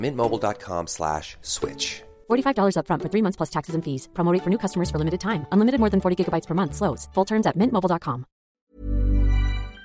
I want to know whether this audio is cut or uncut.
cut